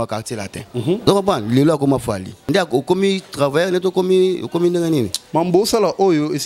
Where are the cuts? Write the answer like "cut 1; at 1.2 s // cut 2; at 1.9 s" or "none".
cut 1; at 1.1 s // cut 2; at 2.3 s